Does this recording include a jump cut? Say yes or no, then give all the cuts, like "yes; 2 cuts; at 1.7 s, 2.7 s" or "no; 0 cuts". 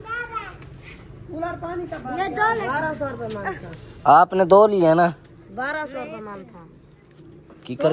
no; 0 cuts